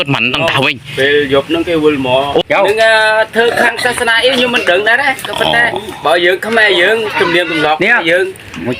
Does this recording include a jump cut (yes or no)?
yes